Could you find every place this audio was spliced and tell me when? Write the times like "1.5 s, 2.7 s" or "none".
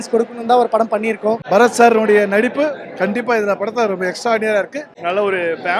1.4 s, 4.9 s

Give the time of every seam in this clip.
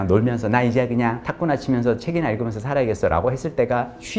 1.3 s

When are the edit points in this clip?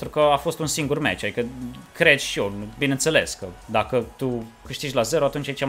4.8 s

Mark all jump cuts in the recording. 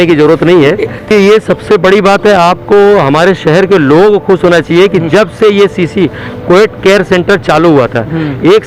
1.1 s

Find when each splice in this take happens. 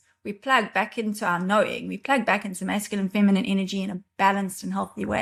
none

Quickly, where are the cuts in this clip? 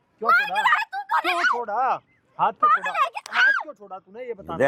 none

